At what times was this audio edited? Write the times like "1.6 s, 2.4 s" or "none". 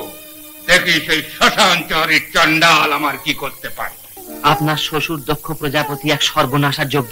4.2 s